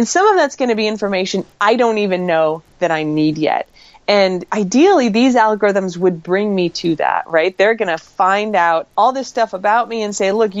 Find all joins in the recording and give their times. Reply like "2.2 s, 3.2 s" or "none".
4.4 s, 8.9 s